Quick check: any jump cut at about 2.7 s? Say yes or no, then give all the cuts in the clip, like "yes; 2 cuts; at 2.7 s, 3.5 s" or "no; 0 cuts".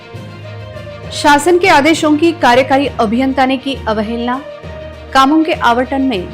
no; 1 cut; at 1.1 s